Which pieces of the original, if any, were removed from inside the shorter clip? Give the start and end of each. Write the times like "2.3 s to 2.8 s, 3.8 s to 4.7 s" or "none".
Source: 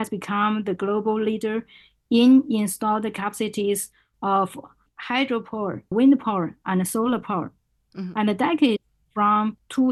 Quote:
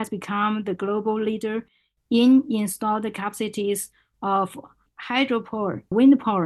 none